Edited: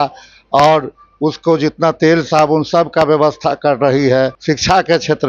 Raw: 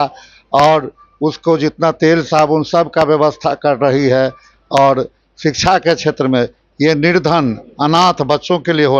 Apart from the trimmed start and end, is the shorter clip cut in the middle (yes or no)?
yes